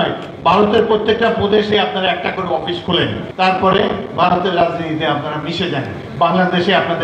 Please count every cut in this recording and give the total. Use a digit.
1